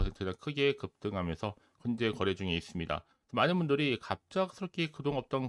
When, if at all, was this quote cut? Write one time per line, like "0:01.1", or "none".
0:01.7